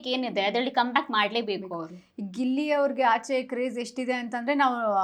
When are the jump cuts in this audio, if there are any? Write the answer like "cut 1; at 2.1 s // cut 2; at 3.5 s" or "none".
none